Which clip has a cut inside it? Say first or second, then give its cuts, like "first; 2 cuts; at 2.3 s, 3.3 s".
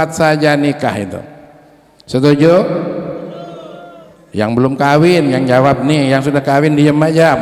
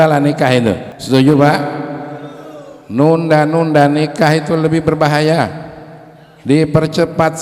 second; 1 cut; at 0.9 s